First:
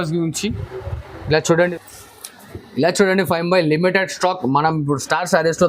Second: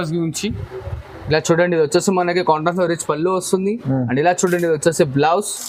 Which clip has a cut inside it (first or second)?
first